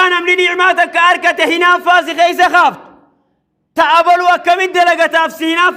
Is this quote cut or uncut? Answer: uncut